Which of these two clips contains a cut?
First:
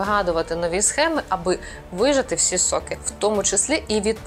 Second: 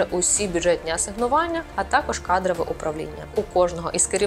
second; 1 cut; at 3.3 s

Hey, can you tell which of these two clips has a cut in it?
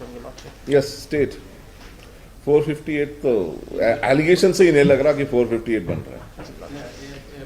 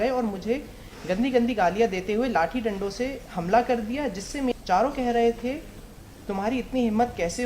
second; 1 cut; at 4.5 s

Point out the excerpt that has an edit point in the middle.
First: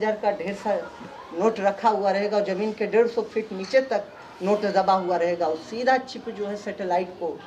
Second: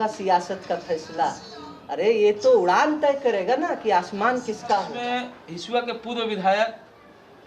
second; 1 cut; at 5.0 s

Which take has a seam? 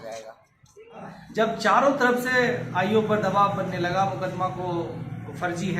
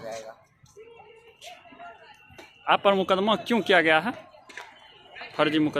first; 1 cut; at 1.1 s

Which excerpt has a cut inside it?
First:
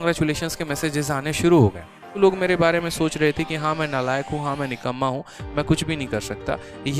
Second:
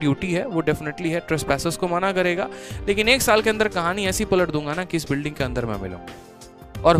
first; 1 cut; at 2.2 s

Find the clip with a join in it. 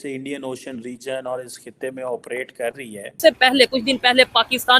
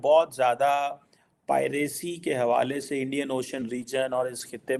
first; 1 cut; at 3.2 s

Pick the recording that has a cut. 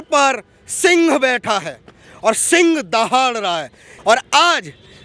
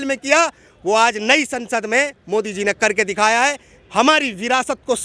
first; 1 cut; at 3.9 s

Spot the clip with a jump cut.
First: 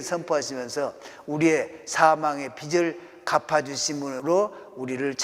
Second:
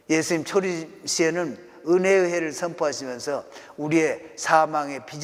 first; 1 cut; at 4.2 s

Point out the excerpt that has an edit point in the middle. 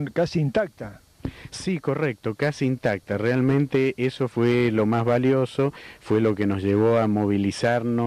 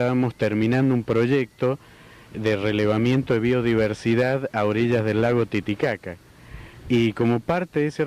second; 1 cut; at 5.5 s

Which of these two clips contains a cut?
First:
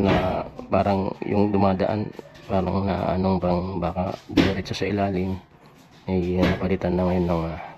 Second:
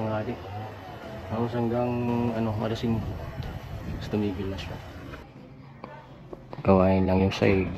second; 1 cut; at 5.2 s

